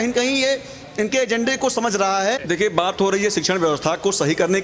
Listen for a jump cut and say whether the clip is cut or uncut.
cut